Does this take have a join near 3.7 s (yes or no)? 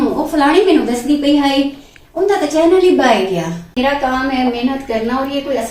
yes